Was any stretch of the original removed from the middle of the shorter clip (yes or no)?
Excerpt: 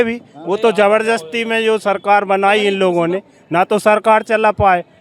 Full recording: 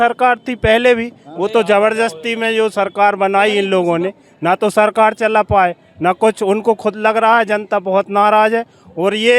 no